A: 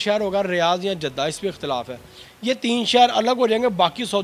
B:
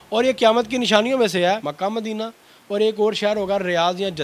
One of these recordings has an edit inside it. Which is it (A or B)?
B